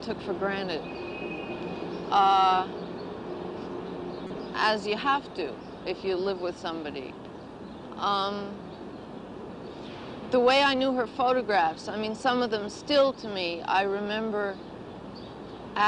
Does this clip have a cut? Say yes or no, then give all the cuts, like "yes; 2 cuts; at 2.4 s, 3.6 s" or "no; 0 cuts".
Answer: yes; 1 cut; at 1.1 s